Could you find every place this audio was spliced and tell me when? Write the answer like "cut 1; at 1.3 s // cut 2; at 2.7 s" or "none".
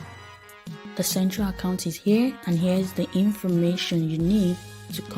cut 1; at 0.9 s